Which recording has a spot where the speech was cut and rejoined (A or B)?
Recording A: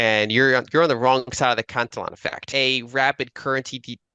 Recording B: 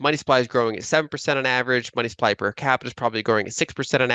A